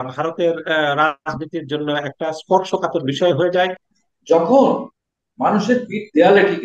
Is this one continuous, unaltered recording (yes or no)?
no